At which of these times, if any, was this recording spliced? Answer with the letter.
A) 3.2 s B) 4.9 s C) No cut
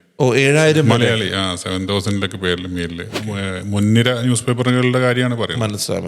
A